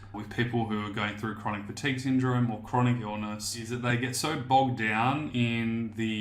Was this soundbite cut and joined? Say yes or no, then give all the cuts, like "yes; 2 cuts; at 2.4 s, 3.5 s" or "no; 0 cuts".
yes; 1 cut; at 3.7 s